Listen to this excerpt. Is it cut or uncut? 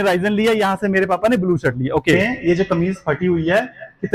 cut